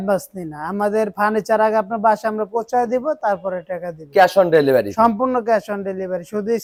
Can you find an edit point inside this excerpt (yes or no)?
no